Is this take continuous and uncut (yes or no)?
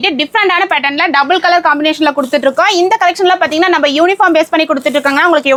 yes